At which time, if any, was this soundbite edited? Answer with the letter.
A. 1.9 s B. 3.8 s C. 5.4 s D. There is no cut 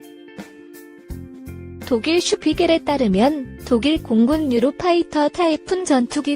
A